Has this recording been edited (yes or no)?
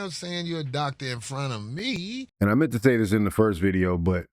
yes